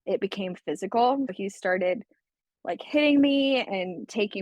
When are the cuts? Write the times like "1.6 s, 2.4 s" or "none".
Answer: 1.3 s